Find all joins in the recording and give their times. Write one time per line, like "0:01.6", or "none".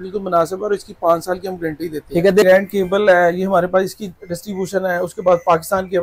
0:02.4

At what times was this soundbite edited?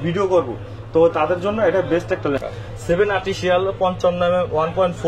0:02.4

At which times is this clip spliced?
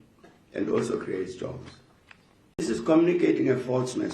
0:02.6

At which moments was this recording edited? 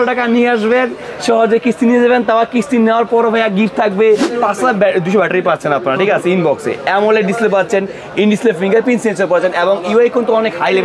0:04.3

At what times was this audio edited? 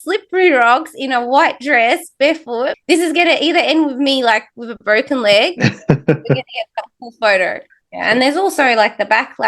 0:02.8
0:07.6

